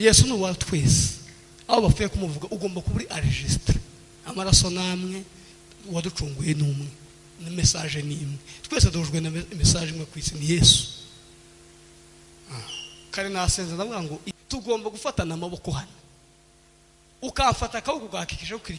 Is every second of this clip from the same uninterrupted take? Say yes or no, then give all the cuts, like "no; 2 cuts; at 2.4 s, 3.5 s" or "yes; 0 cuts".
no; 1 cut; at 14.3 s